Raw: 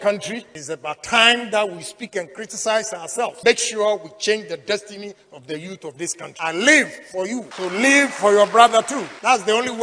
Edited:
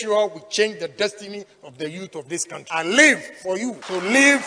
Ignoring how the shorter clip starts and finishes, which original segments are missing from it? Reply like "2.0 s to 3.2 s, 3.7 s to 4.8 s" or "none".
none